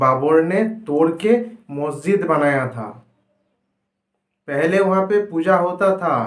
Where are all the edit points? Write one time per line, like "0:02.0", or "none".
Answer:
none